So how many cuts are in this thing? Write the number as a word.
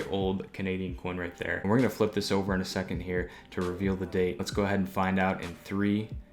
two